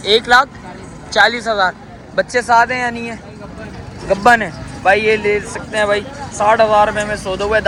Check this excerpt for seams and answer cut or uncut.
uncut